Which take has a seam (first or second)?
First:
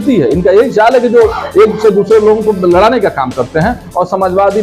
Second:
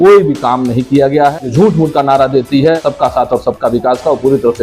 second